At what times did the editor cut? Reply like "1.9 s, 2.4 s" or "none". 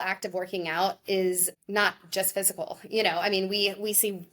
1.5 s